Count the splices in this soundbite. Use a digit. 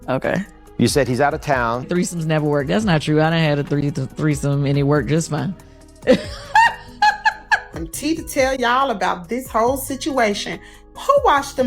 2